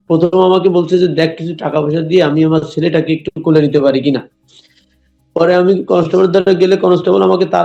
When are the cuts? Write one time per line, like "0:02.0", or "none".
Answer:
none